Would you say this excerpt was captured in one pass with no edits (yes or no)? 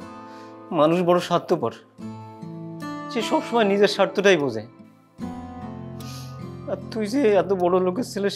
no